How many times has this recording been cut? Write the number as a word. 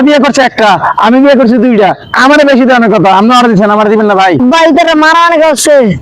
one